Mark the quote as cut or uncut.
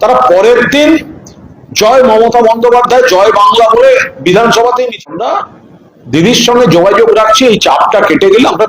cut